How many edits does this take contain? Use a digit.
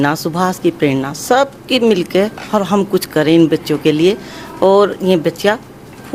0